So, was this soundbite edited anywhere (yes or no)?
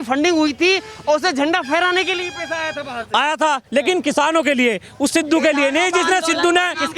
no